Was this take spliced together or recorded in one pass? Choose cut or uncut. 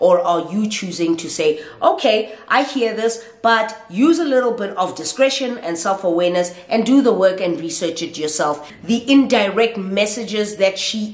cut